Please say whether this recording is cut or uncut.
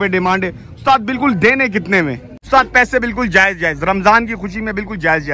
cut